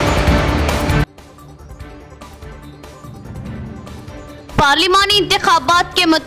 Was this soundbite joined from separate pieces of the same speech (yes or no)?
no